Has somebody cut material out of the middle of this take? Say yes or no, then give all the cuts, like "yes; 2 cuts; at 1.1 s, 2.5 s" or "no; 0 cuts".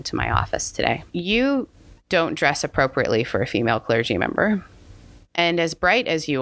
yes; 2 cuts; at 1.1 s, 5.2 s